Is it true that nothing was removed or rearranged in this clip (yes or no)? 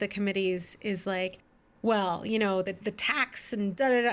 yes